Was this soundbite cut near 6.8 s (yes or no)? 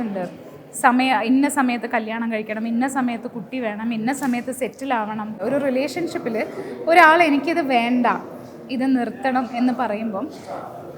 no